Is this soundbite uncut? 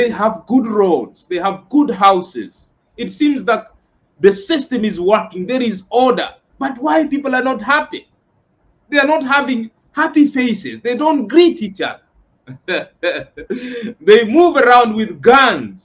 no; 1 cut; at 13.6 s

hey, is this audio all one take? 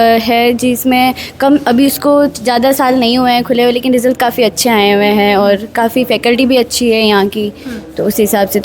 yes; 0 cuts

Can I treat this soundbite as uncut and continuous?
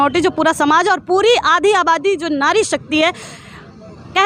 yes; 0 cuts

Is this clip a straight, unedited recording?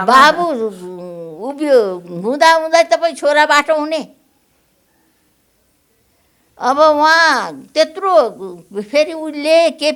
yes; 0 cuts

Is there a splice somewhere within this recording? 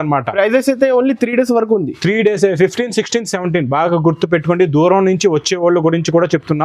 no; 0 cuts

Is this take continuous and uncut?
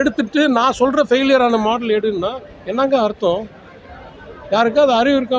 yes; 0 cuts

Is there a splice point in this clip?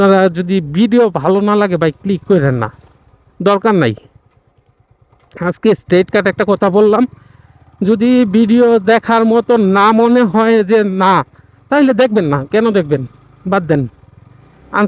no; 0 cuts

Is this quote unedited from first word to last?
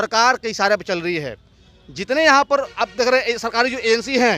yes; 0 cuts

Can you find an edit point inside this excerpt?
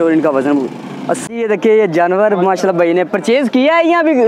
yes; 1 cut; at 1.2 s

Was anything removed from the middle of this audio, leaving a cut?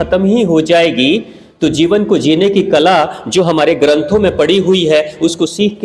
no; 0 cuts

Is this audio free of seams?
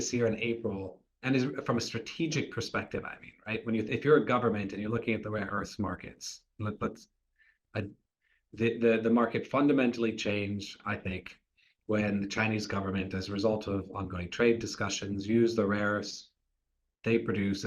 yes; 0 cuts

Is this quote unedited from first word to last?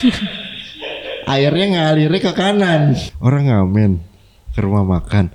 no; 1 cut; at 3.1 s

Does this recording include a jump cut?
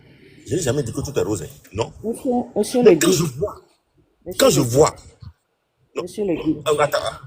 no; 0 cuts

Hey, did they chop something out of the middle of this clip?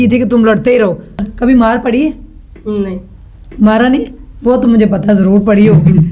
yes; 1 cut; at 1.2 s

